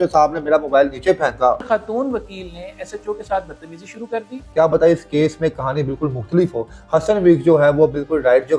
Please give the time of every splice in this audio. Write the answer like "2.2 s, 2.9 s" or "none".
1.6 s, 4.4 s

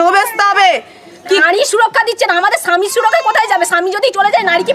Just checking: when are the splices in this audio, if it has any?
1.4 s

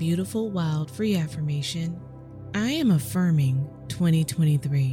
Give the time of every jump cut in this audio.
none

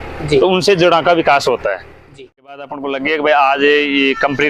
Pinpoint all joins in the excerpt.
2.6 s

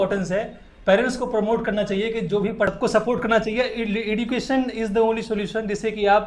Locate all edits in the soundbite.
2.7 s

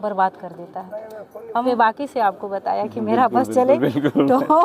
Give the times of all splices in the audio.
1.7 s

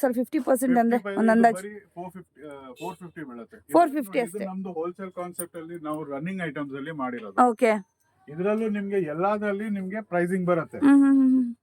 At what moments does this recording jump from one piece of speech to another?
4.3 s

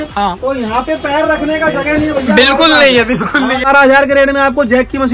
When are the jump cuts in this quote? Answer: 3.7 s

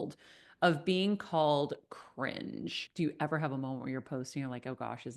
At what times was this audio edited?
2.8 s

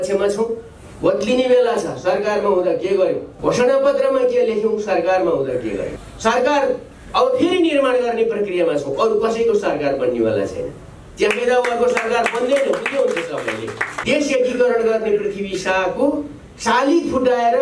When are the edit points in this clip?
3.3 s, 6.0 s, 13.9 s

